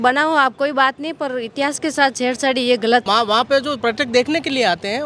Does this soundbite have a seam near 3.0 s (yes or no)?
yes